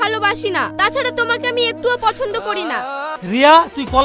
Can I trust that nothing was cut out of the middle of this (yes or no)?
no